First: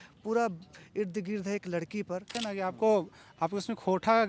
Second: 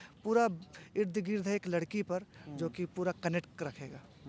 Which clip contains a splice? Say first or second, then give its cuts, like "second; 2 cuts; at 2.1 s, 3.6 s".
first; 1 cut; at 2.4 s